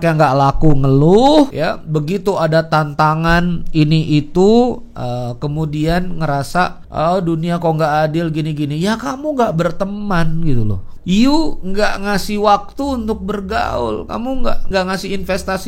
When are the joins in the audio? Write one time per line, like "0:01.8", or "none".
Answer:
0:01.5
0:06.8
0:10.9
0:14.6